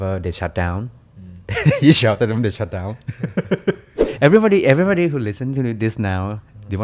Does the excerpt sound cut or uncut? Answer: cut